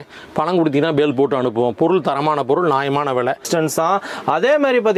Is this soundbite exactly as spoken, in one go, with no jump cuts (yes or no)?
no